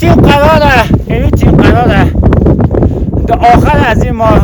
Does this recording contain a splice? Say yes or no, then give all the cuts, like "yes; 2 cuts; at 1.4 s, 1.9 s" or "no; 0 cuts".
no; 0 cuts